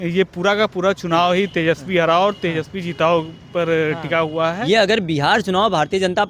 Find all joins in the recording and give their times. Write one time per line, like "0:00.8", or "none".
0:04.6